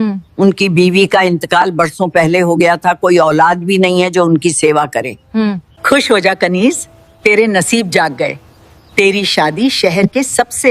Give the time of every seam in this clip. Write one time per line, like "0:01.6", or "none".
0:05.4